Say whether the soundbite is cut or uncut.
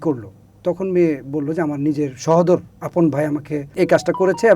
cut